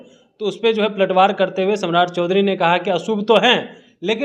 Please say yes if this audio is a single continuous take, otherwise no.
yes